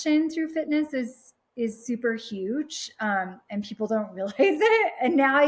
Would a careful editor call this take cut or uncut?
uncut